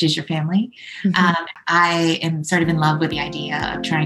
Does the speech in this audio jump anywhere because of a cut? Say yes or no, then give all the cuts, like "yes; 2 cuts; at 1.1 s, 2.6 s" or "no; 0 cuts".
yes; 1 cut; at 1.5 s